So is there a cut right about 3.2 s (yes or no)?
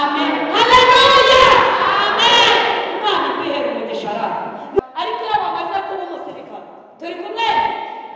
no